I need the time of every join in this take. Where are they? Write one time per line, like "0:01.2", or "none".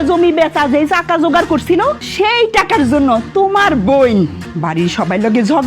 0:02.0
0:04.5